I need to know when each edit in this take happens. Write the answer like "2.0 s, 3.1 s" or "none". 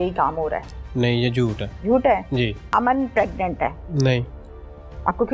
1.7 s, 2.6 s, 3.8 s